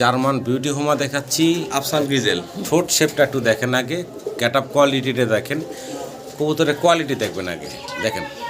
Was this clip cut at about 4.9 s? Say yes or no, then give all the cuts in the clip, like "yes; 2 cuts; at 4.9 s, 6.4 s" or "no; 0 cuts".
no; 0 cuts